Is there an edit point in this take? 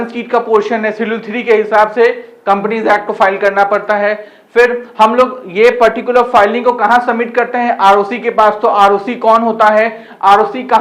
no; 0 cuts

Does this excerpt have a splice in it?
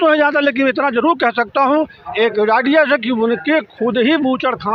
no; 0 cuts

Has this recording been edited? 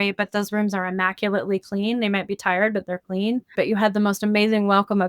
yes; 1 cut; at 3.5 s

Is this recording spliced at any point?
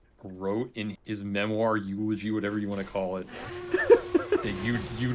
yes; 1 cut; at 0.9 s

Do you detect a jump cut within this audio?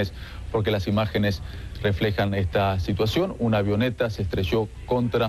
yes; 1 cut; at 1.2 s

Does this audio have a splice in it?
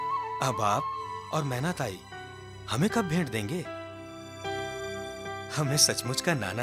no; 0 cuts

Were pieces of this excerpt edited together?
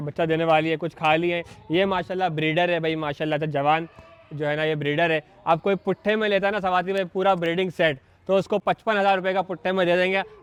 no; 0 cuts

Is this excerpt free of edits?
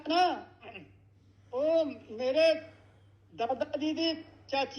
yes; 0 cuts

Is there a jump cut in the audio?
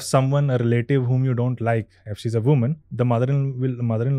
yes; 1 cut; at 2.8 s

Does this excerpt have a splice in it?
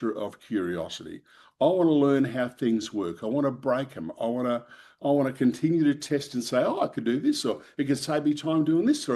no; 0 cuts

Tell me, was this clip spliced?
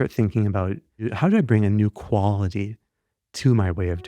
yes; 1 cut; at 1.1 s

